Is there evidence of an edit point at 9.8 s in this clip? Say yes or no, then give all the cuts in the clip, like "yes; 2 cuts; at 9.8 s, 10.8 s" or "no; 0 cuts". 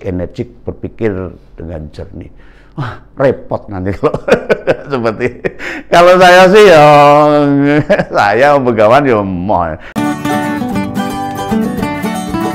yes; 1 cut; at 9.8 s